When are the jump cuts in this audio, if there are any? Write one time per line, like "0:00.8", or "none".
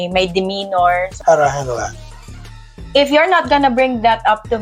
0:01.1